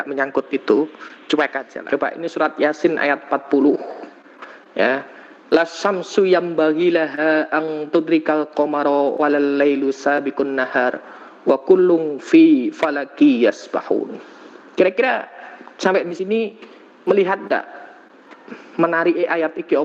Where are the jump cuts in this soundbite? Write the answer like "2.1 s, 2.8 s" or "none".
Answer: 1.7 s, 14.2 s